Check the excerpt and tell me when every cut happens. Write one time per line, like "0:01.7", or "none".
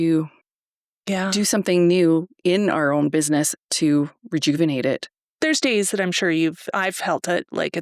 0:05.2